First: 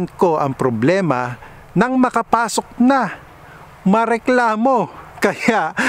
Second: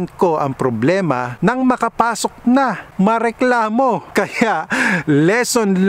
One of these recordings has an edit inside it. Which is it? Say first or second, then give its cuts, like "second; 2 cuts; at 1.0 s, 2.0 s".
second; 3 cuts; at 1.3 s, 2.8 s, 4.0 s